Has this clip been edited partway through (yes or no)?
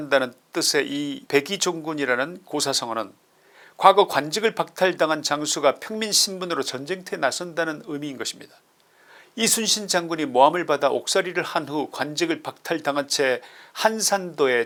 no